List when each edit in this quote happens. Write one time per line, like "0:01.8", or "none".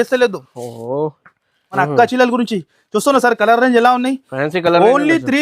0:01.6